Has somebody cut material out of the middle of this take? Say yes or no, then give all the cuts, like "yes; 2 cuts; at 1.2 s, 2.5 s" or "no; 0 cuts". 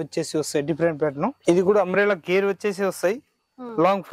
yes; 1 cut; at 1.4 s